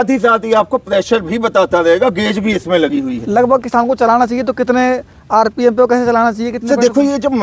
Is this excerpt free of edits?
yes; 0 cuts

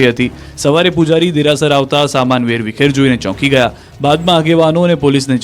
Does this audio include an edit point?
yes; 1 cut; at 1.8 s

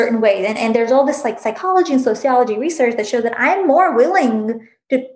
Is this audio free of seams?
yes; 0 cuts

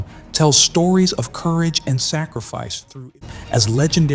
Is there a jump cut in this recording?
yes; 1 cut; at 3.1 s

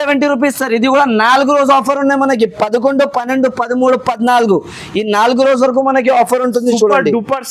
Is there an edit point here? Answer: no; 0 cuts

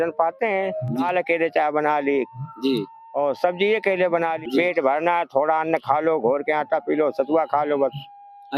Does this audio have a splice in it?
yes; 2 cuts; at 1.0 s, 4.4 s

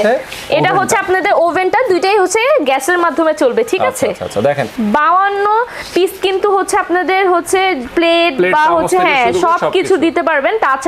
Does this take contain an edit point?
yes; 1 cut; at 4.7 s

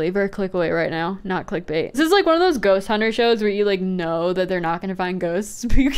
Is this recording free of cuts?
no; 1 cut; at 2.0 s

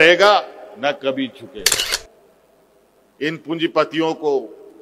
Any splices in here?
yes; 1 cut; at 1.8 s

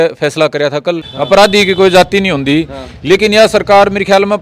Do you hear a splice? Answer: yes; 1 cut; at 1.1 s

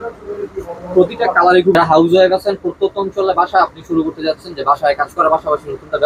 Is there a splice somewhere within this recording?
yes; 1 cut; at 1.8 s

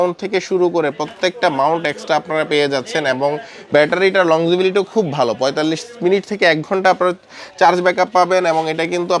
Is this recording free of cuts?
yes; 0 cuts

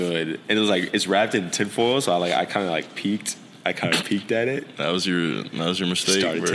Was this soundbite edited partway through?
no; 0 cuts

